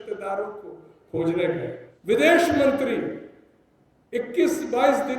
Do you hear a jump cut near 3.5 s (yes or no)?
no